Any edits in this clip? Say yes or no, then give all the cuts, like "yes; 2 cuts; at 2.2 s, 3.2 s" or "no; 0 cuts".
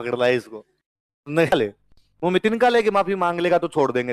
yes; 1 cut; at 1.5 s